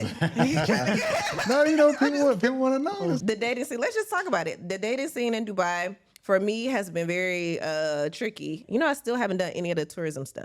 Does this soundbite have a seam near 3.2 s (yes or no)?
yes